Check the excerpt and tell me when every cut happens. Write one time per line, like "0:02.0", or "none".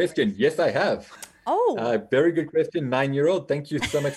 none